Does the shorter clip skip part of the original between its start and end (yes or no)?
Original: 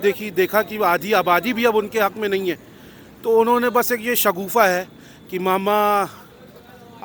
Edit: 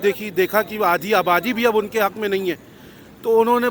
no